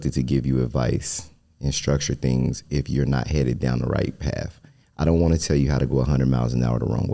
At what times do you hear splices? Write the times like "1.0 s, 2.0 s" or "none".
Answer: none